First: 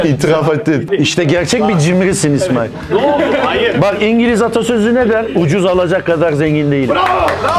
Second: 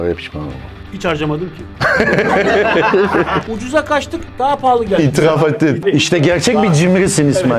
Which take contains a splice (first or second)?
second